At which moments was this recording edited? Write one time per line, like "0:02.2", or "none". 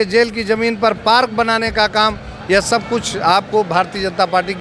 none